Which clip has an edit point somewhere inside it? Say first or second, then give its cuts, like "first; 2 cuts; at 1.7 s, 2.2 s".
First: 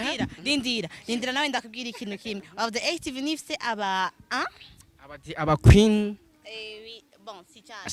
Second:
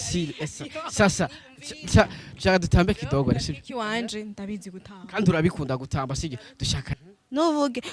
second; 1 cut; at 6.8 s